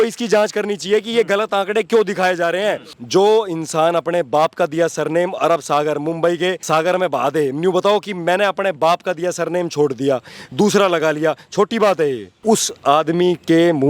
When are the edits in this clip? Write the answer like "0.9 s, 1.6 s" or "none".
2.9 s, 6.6 s, 12.3 s